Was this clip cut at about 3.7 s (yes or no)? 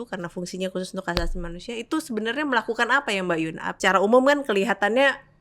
yes